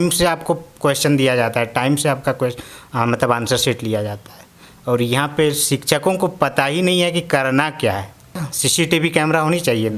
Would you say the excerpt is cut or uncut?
cut